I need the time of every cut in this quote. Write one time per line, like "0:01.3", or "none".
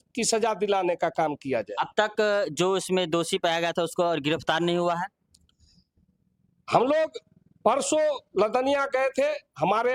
none